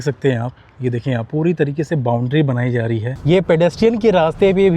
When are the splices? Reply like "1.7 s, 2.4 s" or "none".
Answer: 3.1 s